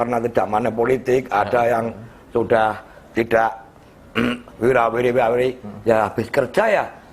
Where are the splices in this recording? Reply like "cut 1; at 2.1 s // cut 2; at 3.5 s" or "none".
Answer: none

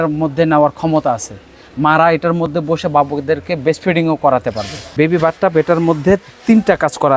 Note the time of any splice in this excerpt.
cut 1; at 4.9 s

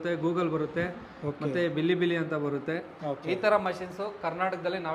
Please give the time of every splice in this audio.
cut 1; at 2.9 s

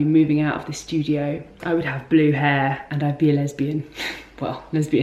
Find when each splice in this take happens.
cut 1; at 1.5 s // cut 2; at 2.9 s

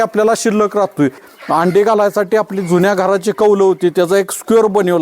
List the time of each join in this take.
cut 1; at 1.3 s

